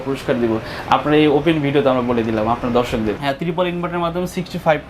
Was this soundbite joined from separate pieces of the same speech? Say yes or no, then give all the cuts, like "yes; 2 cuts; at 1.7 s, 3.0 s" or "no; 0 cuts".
yes; 1 cut; at 3.2 s